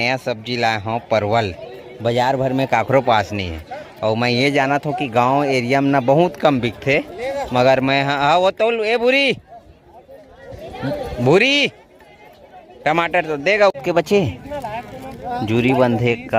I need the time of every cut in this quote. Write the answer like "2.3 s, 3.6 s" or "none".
13.8 s